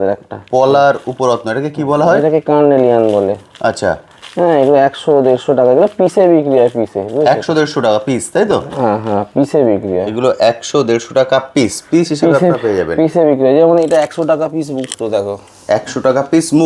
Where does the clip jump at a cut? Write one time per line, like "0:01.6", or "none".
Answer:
none